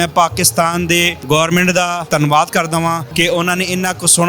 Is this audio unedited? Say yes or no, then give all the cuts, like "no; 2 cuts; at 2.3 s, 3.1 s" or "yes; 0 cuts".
no; 3 cuts; at 1.2 s, 2.0 s, 3.1 s